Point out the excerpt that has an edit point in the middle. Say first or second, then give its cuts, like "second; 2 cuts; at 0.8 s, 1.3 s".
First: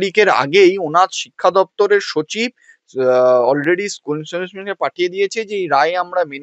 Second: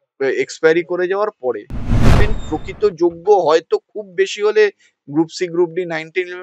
second; 1 cut; at 2.1 s